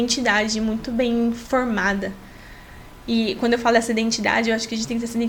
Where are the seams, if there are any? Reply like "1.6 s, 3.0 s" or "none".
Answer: none